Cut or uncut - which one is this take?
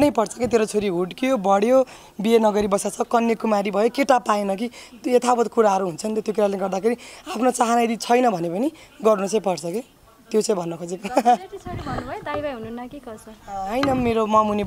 uncut